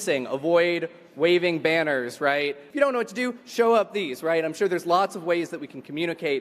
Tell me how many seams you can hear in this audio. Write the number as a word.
one